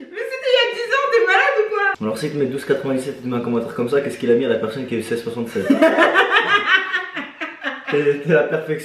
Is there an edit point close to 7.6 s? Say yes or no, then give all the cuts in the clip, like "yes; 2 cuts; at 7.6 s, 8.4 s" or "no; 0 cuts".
no; 1 cut; at 1.9 s